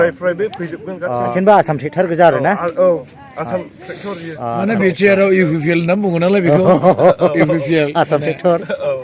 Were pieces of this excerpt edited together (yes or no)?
yes